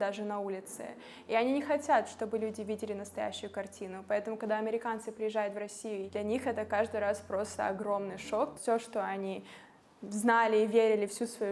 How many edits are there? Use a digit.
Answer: 2